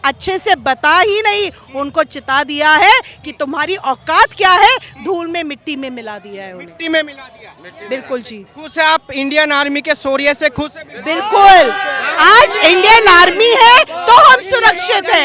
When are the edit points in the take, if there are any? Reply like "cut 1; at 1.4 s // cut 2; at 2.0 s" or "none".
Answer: none